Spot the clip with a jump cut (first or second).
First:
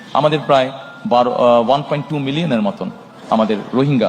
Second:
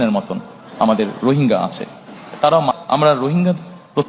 second